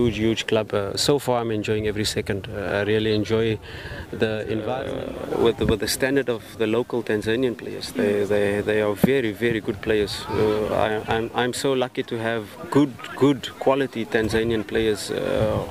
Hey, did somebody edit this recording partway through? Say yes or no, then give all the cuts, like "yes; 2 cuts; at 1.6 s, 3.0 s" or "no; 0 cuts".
yes; 1 cut; at 4.9 s